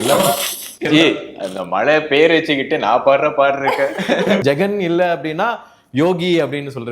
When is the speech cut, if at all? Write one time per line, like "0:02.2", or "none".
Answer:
0:04.4